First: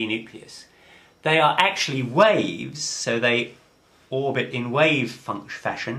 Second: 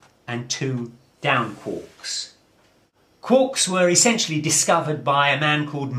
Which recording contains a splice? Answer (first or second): second